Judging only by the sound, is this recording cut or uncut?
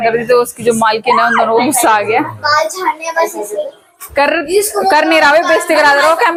uncut